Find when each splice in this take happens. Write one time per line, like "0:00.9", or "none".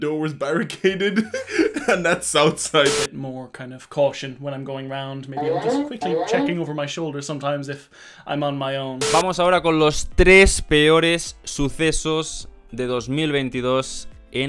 0:03.0
0:09.1